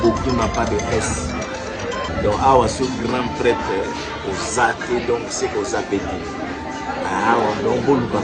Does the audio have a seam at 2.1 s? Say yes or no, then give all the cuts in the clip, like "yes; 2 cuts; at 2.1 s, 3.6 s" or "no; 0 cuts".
yes; 1 cut; at 2.1 s